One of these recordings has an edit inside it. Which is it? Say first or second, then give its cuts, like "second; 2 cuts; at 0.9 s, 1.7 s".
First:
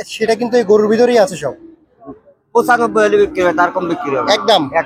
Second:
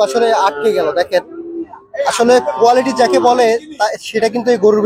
first; 1 cut; at 2.0 s